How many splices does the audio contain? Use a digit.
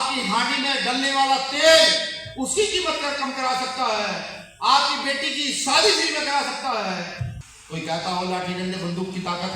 1